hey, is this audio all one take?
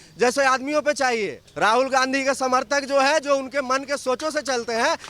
no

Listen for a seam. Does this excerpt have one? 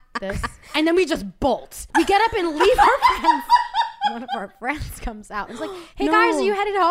yes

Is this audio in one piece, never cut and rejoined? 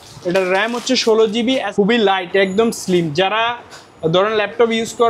no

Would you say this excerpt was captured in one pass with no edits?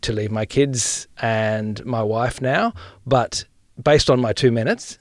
no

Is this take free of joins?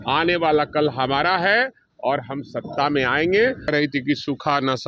no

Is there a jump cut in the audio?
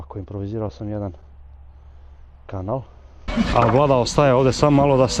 yes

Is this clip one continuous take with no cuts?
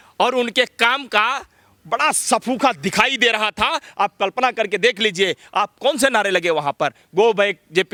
yes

